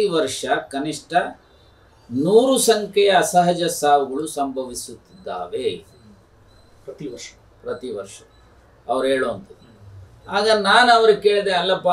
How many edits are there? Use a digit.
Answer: 0